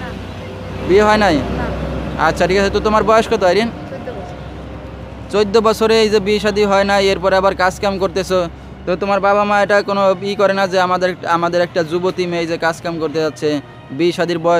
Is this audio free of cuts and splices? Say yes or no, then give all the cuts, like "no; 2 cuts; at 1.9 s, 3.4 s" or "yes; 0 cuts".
yes; 0 cuts